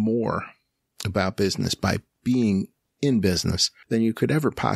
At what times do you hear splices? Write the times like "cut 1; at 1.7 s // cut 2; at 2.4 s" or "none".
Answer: cut 1; at 3.7 s